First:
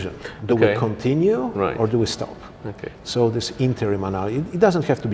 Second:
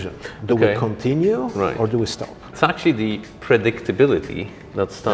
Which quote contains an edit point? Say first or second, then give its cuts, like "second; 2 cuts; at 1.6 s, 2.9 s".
second; 1 cut; at 2.5 s